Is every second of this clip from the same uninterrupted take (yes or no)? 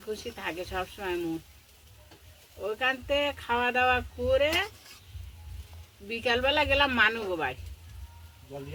yes